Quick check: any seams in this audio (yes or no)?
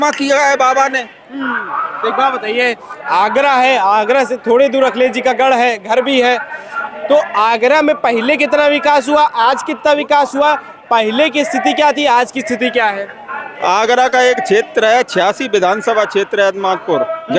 no